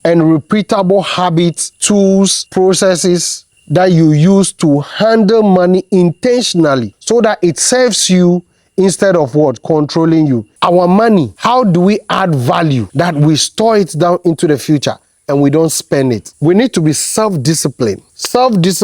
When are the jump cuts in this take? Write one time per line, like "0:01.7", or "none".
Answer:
0:02.1
0:06.9
0:10.5
0:16.3